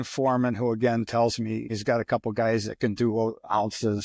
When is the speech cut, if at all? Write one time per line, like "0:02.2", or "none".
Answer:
0:01.7

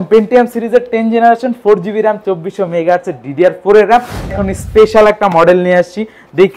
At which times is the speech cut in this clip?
0:04.3

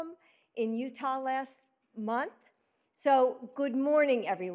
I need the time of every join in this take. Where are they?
0:01.9

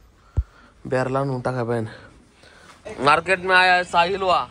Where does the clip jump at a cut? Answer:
0:02.8

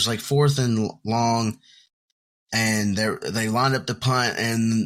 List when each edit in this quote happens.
none

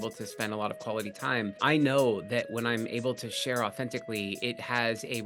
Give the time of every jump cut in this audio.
0:01.5

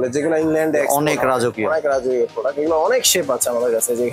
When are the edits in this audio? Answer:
none

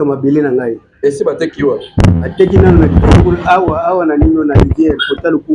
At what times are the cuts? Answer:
none

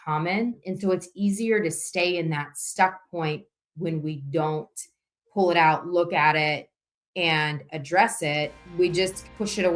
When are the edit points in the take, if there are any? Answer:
0:08.6

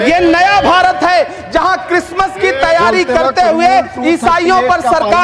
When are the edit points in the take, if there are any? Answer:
none

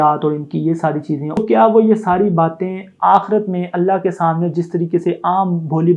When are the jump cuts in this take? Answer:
0:01.4

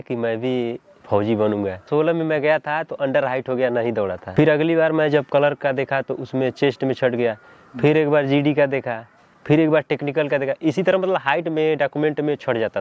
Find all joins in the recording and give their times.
0:01.8
0:04.2

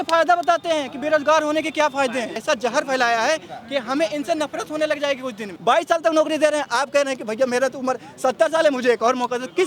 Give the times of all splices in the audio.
0:02.3
0:05.5

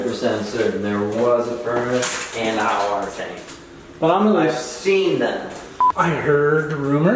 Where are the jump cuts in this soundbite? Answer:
0:05.7

